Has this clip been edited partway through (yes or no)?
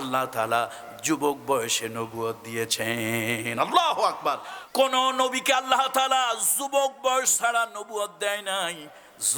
yes